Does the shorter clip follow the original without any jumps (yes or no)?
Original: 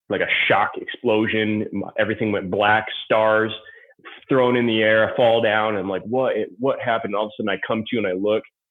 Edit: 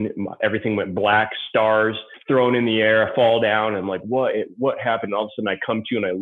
no